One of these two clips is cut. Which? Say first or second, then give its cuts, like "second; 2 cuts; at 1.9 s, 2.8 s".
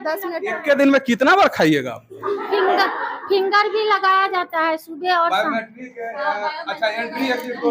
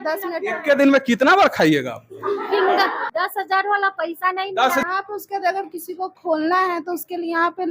second; 2 cuts; at 3.0 s, 4.8 s